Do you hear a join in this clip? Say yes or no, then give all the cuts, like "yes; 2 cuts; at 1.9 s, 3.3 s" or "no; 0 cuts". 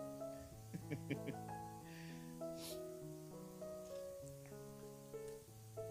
no; 0 cuts